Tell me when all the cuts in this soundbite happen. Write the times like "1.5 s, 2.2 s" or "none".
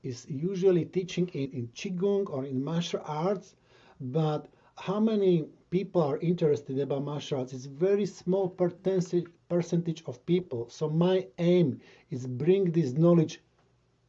1.5 s, 5.6 s